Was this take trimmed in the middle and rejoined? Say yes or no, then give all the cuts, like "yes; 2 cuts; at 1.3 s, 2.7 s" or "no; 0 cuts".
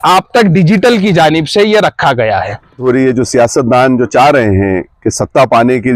yes; 1 cut; at 2.8 s